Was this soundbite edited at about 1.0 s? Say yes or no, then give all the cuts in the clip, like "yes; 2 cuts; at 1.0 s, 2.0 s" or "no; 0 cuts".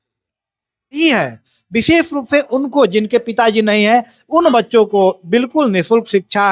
yes; 1 cut; at 1.0 s